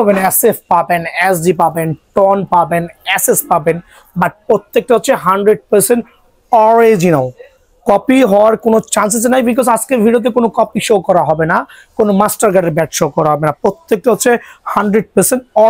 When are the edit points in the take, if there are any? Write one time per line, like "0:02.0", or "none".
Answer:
none